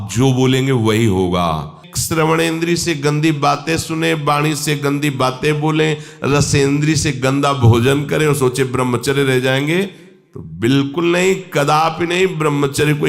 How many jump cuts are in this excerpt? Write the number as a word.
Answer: one